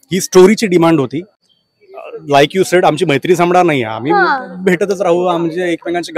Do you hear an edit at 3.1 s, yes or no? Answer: no